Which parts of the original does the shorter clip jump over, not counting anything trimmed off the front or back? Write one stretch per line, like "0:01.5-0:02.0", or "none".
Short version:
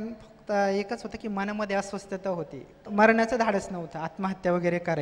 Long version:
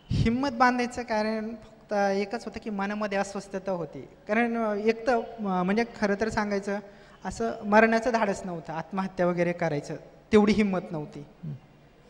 0:04.2-0:07.6